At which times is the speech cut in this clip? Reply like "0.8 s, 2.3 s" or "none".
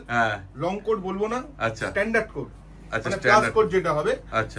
none